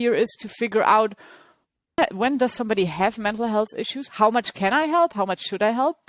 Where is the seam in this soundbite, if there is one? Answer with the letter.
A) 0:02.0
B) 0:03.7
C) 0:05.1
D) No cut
A